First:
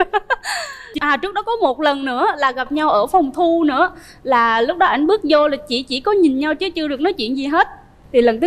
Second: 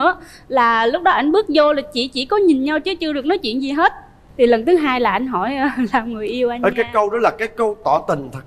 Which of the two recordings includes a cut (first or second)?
first